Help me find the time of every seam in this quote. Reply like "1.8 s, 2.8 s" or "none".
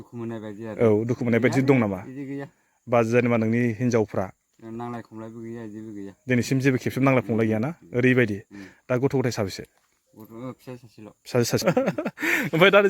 11.6 s